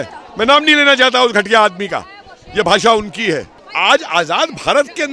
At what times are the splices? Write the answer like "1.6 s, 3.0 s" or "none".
3.6 s